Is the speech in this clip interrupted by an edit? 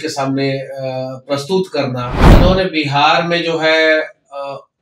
yes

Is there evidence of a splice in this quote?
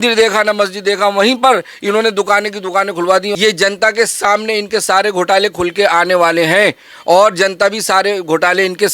yes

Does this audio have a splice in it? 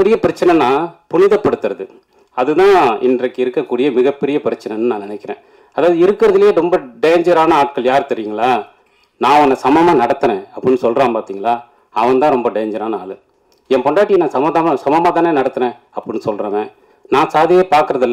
no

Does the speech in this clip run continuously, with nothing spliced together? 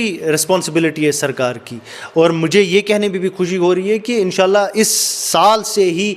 yes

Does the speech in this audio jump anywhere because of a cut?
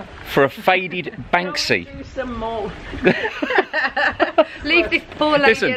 no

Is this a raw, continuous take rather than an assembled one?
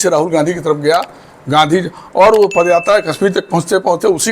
yes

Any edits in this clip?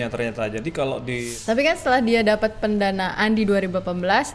yes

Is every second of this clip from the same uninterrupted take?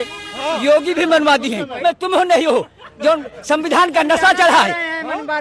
no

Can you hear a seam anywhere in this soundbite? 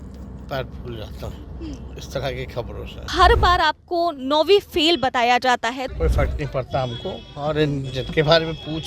yes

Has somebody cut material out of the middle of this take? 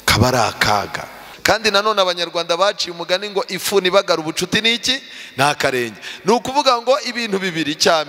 yes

